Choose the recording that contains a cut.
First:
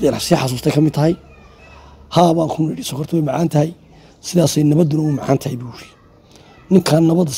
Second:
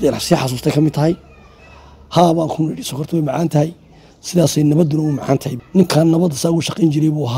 second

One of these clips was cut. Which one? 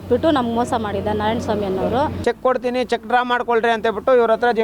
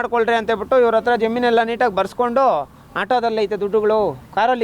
first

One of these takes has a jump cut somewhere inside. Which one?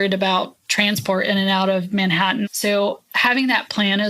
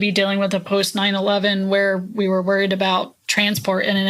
first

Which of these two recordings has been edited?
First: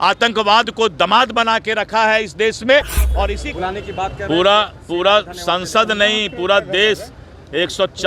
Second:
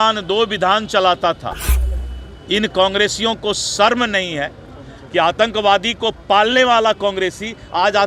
first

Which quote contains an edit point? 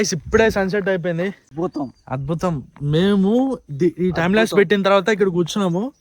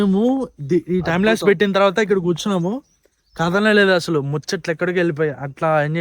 first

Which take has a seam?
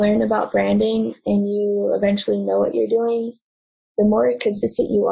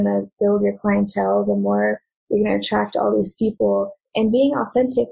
second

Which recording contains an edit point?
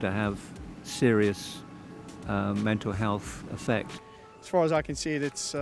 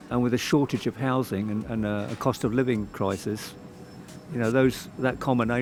first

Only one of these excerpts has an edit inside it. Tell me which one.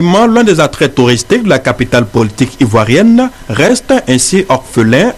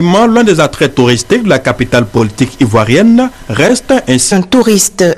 first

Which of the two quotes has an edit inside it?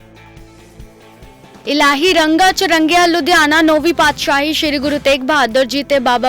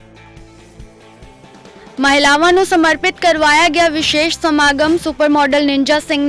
first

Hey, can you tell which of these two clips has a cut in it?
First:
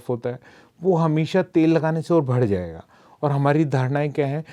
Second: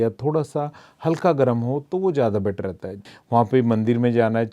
second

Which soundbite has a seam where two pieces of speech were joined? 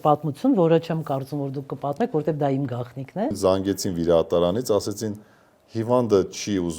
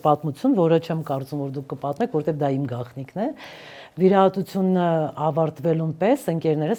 first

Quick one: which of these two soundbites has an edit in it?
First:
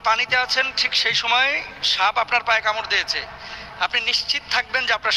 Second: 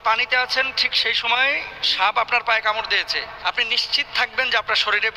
second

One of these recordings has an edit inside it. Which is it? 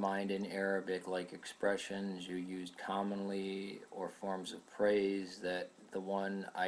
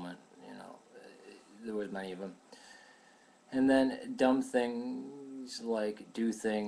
second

